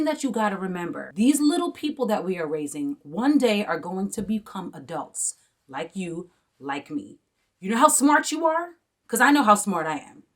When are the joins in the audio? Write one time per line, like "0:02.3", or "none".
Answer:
0:01.0